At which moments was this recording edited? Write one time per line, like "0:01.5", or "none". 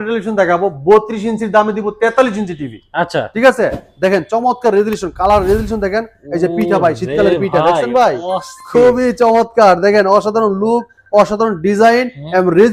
none

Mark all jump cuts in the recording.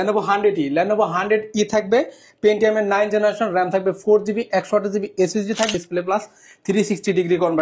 0:05.7

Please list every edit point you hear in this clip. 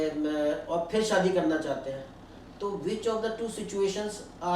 none

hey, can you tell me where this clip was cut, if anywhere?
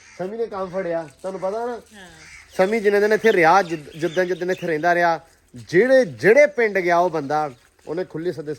none

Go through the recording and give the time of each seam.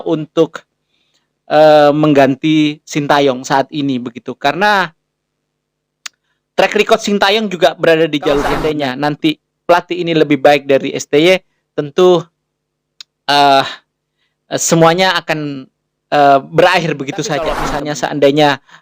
0:08.7
0:17.7

